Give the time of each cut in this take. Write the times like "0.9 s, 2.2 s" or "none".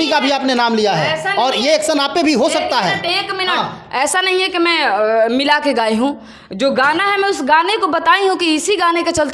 none